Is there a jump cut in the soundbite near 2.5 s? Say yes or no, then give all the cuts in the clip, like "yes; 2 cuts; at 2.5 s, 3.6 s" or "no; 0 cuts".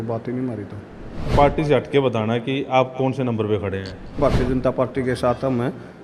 no; 2 cuts; at 1.3 s, 4.2 s